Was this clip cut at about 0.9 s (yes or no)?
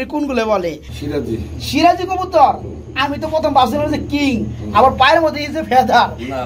yes